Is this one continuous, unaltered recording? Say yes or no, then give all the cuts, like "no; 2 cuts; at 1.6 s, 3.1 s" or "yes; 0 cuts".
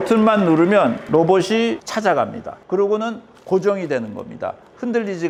yes; 0 cuts